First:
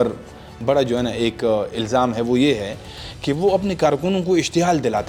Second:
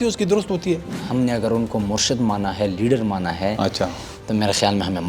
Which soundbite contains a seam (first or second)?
second